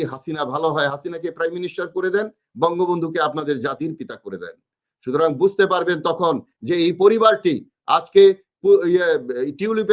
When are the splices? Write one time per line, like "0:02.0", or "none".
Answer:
none